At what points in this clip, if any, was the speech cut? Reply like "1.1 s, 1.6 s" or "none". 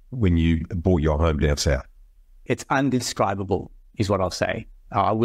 2.5 s